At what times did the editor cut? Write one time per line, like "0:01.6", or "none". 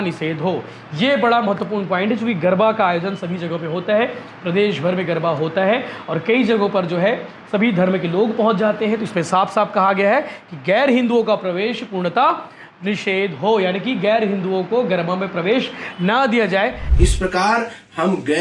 0:16.8